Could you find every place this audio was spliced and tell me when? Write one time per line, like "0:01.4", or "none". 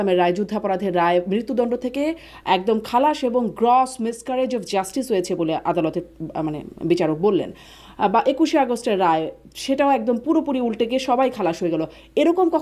none